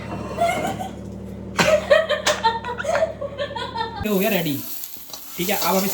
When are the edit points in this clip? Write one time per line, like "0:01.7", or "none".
0:04.0